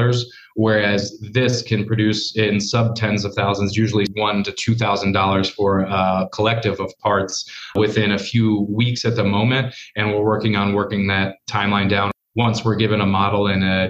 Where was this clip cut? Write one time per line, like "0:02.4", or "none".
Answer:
0:04.1
0:07.7
0:12.1